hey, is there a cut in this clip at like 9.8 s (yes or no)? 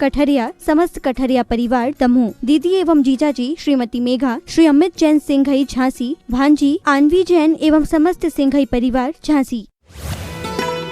yes